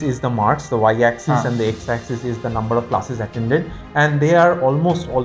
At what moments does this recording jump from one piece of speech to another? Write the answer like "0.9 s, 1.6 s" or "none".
none